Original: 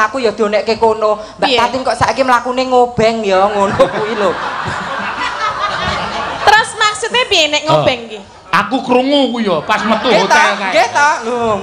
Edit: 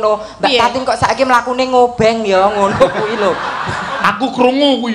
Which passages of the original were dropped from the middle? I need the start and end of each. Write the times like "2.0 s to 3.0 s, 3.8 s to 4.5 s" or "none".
5.0 s to 8.5 s